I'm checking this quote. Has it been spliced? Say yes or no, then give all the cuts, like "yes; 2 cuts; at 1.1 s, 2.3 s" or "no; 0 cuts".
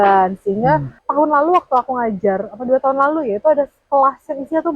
yes; 1 cut; at 1.0 s